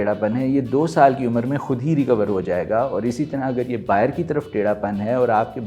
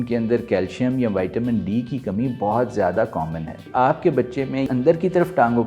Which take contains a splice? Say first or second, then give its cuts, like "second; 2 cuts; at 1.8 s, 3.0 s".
second; 2 cuts; at 3.7 s, 4.7 s